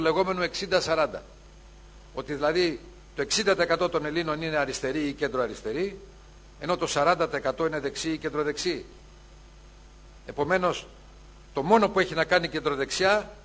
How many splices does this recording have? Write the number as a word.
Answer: zero